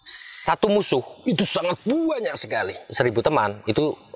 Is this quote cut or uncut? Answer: cut